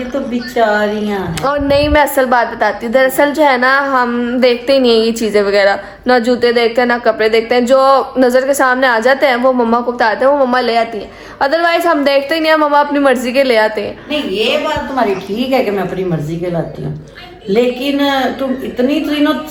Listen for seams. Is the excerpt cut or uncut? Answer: uncut